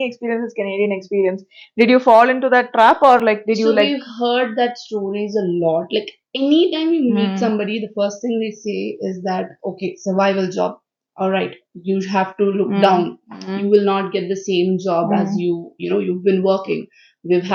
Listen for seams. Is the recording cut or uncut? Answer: uncut